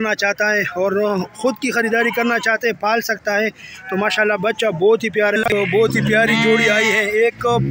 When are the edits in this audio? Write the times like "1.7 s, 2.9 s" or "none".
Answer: 5.4 s